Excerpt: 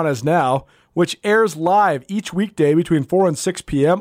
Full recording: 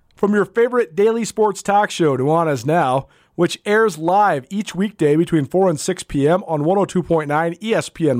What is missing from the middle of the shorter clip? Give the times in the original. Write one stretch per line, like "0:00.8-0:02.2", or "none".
none